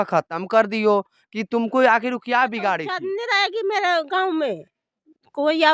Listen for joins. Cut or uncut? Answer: cut